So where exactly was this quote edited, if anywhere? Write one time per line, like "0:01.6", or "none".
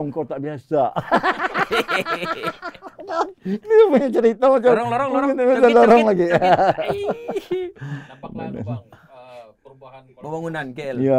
none